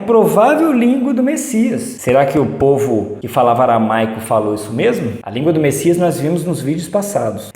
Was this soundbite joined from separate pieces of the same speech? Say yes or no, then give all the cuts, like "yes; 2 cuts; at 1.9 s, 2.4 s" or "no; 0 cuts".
yes; 1 cut; at 5.2 s